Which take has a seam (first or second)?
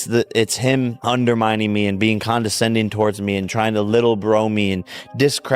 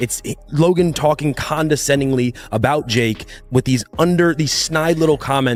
first